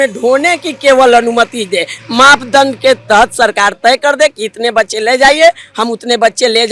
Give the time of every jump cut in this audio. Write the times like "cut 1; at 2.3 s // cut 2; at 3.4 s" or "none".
none

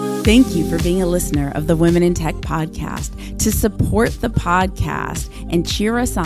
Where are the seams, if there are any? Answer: none

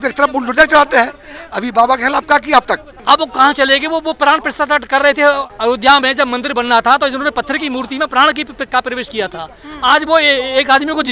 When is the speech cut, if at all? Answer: cut 1; at 2.9 s // cut 2; at 5.4 s

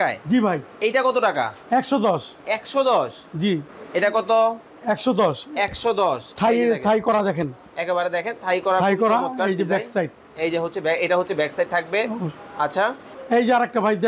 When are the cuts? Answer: cut 1; at 3.7 s // cut 2; at 13.1 s

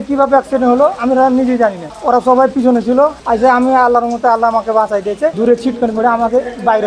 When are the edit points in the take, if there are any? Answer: cut 1; at 1.9 s // cut 2; at 3.2 s // cut 3; at 5.3 s

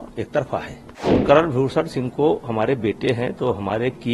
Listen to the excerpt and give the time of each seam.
cut 1; at 1.2 s

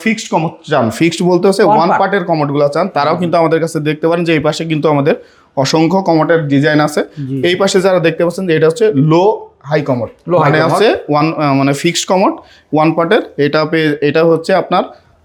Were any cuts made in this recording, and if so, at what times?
none

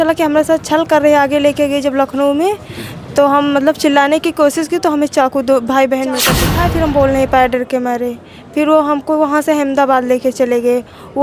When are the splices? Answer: cut 1; at 6.4 s

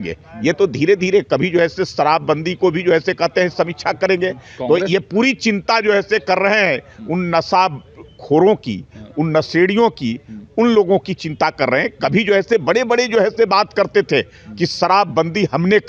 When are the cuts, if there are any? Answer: none

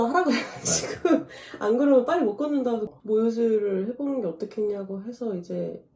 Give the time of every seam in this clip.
cut 1; at 2.9 s

